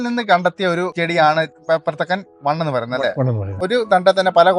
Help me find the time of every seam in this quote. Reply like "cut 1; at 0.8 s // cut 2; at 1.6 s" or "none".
cut 1; at 3.6 s